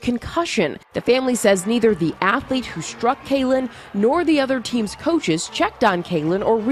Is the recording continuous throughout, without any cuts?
yes; 0 cuts

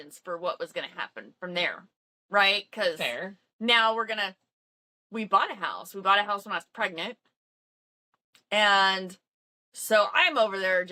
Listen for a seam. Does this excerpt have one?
no; 0 cuts

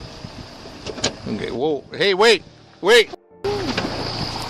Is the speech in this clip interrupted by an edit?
no; 0 cuts

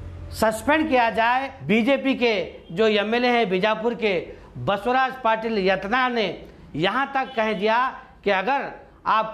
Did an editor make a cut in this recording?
yes; 1 cut; at 1.5 s

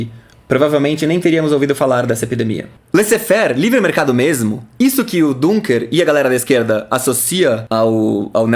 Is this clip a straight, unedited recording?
no; 2 cuts; at 2.7 s, 7.6 s

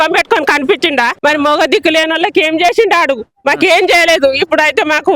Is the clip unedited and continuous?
no; 1 cut; at 1.1 s

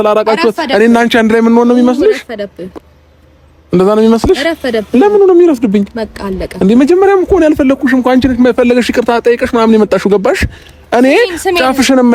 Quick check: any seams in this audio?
no; 0 cuts

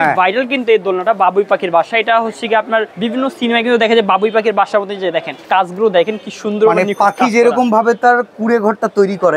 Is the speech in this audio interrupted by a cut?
yes; 3 cuts; at 2.9 s, 5.3 s, 8.3 s

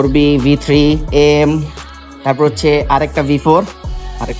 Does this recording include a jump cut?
no; 0 cuts

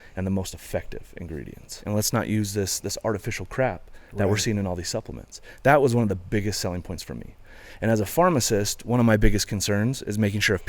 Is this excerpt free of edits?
no; 1 cut; at 1.8 s

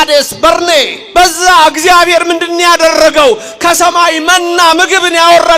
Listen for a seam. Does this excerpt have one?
yes; 1 cut; at 1.0 s

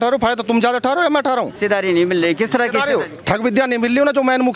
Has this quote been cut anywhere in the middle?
yes; 1 cut; at 1.5 s

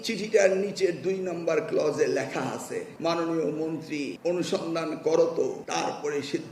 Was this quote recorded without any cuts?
no; 3 cuts; at 2.9 s, 4.2 s, 5.6 s

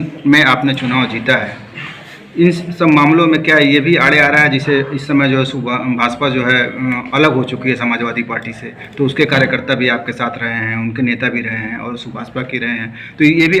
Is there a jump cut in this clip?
no; 0 cuts

